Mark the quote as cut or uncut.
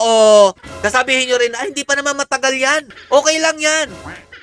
cut